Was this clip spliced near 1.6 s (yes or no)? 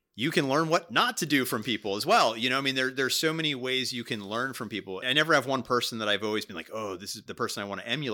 no